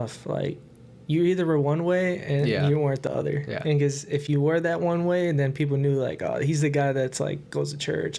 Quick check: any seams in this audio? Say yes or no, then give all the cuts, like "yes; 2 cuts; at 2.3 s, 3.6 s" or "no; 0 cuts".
no; 0 cuts